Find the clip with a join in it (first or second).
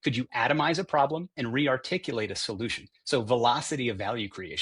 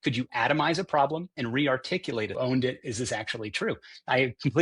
second